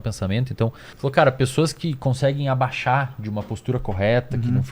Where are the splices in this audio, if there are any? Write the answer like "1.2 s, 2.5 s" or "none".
0.9 s